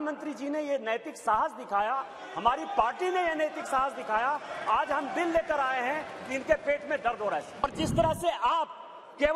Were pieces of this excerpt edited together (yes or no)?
yes